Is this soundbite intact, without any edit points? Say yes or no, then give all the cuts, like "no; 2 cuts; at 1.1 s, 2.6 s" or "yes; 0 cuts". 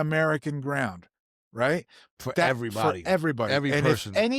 yes; 0 cuts